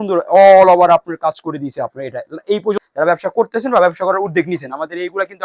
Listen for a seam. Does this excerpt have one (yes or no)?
yes